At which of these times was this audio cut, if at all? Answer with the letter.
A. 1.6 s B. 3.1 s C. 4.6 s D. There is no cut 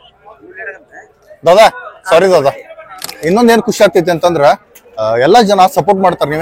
B